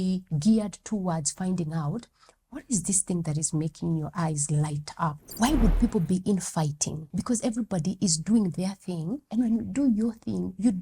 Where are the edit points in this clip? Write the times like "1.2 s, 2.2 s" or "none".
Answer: 5.2 s, 7.0 s, 9.2 s